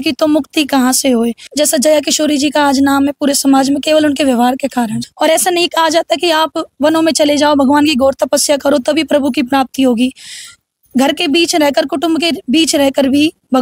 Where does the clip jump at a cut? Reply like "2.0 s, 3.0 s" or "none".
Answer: 1.4 s, 4.9 s